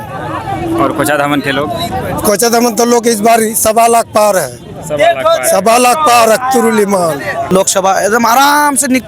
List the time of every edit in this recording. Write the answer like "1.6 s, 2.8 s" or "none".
7.4 s